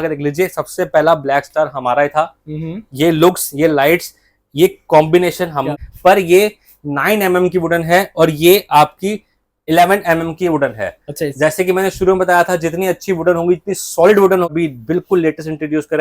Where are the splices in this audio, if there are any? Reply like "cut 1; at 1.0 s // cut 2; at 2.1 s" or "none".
cut 1; at 5.7 s // cut 2; at 14.5 s